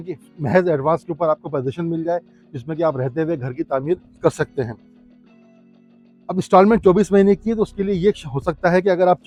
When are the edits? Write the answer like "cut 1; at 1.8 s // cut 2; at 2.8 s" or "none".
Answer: none